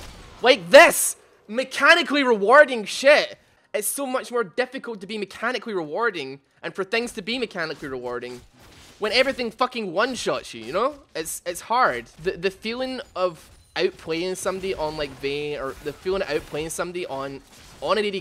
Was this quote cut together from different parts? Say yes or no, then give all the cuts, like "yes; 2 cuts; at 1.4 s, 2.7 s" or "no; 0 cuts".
yes; 2 cuts; at 3.6 s, 12.1 s